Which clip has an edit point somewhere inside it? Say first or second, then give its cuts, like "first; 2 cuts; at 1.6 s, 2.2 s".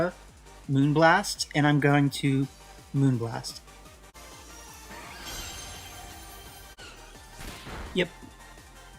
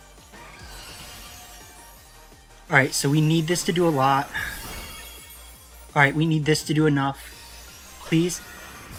first; 2 cuts; at 4.1 s, 6.8 s